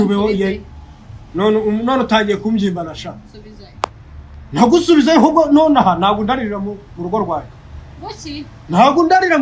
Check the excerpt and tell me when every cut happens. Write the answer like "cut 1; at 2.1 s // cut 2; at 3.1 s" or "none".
none